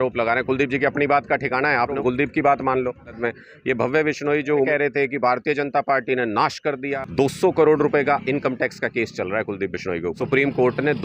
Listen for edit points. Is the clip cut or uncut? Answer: cut